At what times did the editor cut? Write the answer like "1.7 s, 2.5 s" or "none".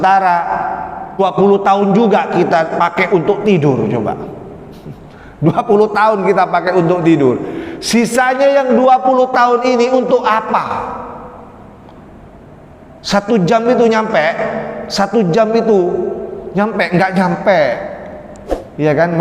1.2 s